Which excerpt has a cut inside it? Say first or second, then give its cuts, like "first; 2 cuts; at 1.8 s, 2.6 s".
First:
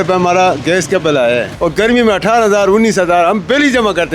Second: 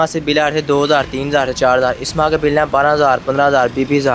first; 1 cut; at 1.5 s